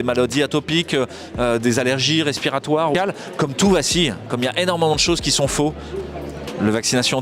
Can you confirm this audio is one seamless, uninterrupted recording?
no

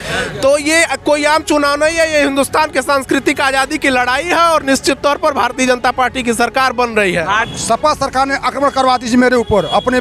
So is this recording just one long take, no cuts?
no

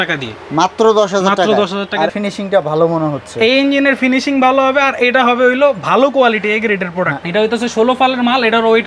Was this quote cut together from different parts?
yes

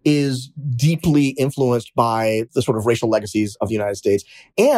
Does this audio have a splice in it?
yes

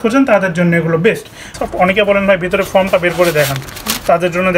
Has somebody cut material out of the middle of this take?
yes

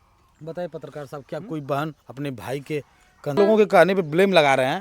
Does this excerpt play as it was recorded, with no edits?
no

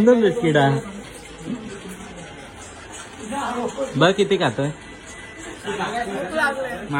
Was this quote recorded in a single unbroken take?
yes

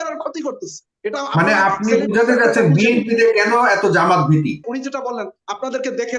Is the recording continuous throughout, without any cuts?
no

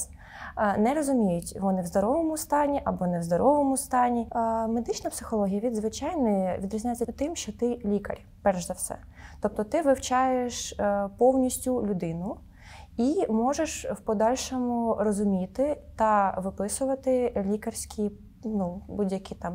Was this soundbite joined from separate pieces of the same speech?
yes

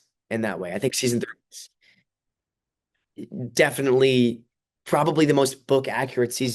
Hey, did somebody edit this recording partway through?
no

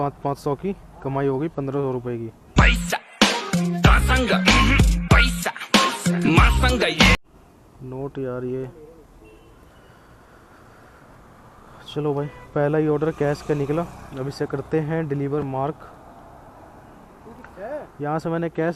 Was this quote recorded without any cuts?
yes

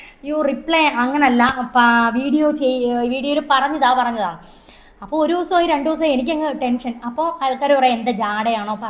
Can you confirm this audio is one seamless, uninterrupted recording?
yes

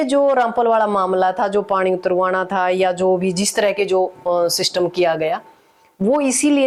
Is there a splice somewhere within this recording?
no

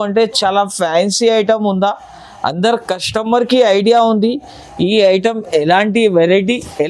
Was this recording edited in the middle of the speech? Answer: no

